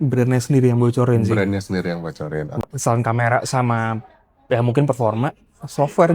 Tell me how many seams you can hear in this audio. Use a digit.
1